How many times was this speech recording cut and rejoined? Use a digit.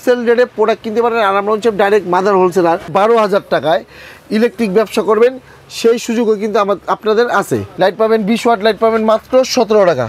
2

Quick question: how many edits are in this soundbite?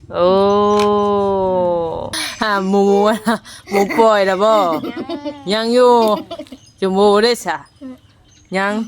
1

